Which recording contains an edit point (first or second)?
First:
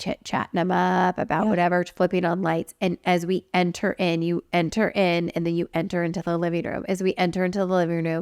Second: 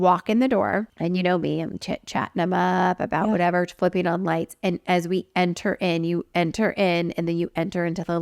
second